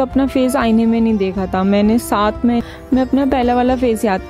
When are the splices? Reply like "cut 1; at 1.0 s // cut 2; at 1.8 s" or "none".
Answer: cut 1; at 2.6 s